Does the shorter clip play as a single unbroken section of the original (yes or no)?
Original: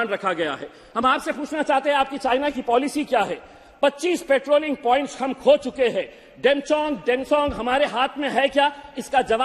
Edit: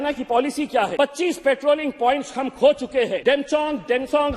no